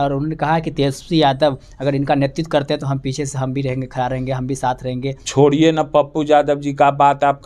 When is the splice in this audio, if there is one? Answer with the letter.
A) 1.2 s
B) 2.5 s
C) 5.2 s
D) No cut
C